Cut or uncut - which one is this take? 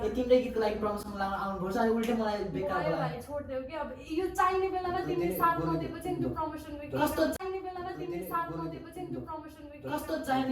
uncut